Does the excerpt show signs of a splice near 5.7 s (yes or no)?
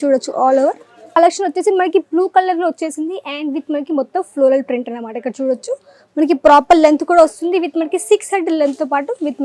no